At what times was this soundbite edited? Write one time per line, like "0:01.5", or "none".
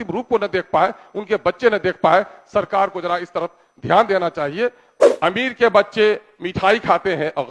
0:05.1